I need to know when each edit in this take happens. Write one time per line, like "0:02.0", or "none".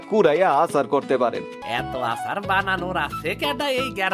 0:01.6